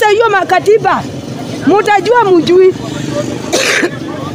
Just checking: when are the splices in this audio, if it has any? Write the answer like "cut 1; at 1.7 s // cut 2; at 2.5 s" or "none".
none